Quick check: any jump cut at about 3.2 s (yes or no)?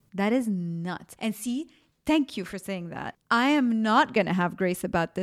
yes